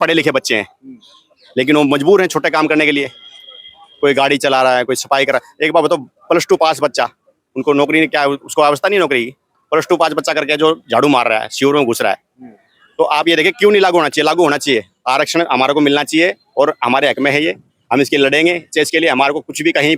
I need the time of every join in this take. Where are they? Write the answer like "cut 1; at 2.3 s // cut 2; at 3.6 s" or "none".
none